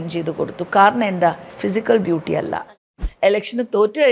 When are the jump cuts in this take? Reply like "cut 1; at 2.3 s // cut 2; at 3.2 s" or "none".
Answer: cut 1; at 1.5 s // cut 2; at 2.9 s